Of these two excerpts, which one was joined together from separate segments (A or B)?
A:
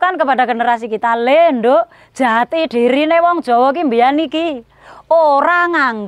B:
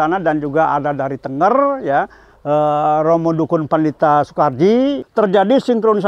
B